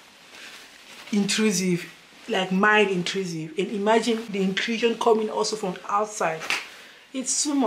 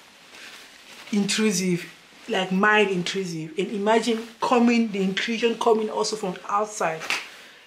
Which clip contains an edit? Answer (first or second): first